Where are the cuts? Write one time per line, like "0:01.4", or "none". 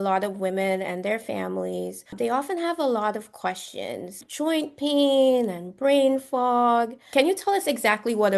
0:02.1
0:04.2
0:07.0